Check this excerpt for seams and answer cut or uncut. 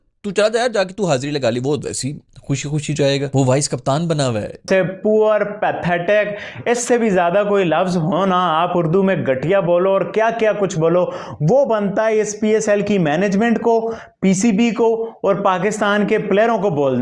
cut